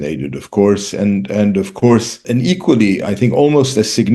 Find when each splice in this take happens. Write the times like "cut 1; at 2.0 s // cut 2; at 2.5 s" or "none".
cut 1; at 2.2 s